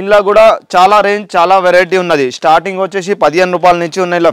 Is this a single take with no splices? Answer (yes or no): yes